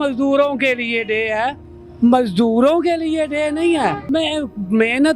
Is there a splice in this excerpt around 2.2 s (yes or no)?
no